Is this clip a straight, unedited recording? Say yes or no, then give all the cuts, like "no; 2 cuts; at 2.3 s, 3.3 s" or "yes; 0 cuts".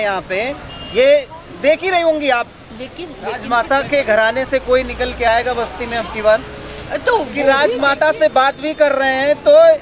no; 2 cuts; at 3.4 s, 7.4 s